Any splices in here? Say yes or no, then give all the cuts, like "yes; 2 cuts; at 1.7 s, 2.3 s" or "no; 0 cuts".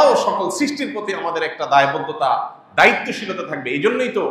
no; 0 cuts